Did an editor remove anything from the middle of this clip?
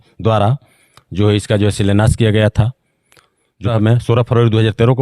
yes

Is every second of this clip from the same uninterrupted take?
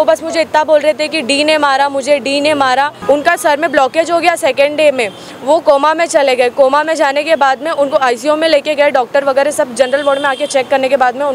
no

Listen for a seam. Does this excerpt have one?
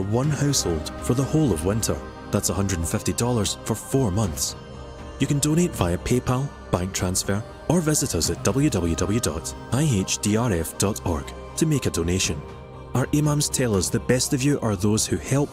no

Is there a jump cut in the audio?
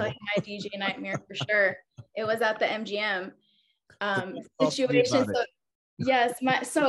yes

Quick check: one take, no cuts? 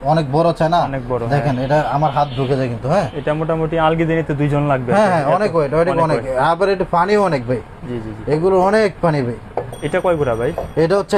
yes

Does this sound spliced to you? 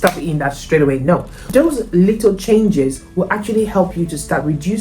yes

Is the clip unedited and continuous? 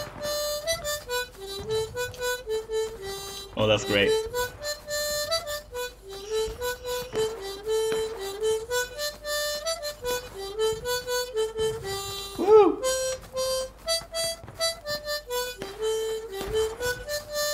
yes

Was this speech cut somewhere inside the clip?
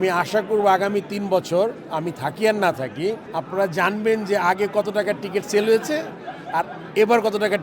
no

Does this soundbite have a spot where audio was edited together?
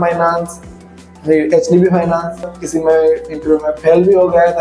yes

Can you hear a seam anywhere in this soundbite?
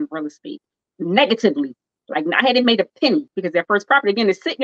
yes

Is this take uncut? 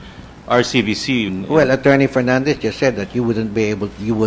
yes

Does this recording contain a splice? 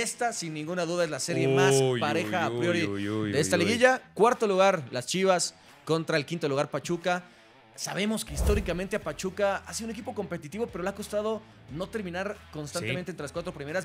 no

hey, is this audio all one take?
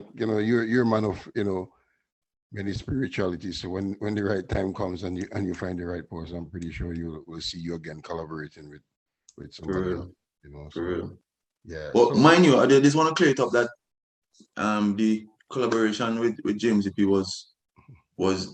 yes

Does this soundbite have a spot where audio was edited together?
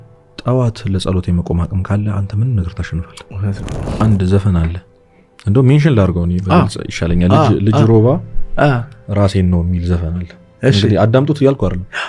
yes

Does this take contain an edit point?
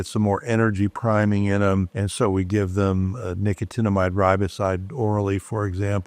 no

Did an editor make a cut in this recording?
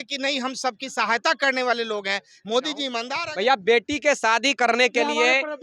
yes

